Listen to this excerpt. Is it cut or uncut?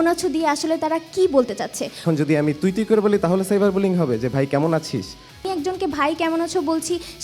cut